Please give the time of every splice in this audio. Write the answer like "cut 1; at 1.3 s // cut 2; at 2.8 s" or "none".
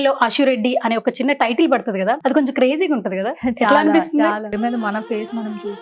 cut 1; at 2.2 s // cut 2; at 4.5 s